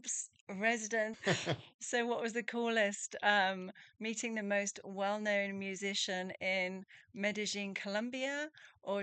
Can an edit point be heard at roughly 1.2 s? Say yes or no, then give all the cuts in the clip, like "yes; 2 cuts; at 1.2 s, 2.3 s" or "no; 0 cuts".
yes; 1 cut; at 1.2 s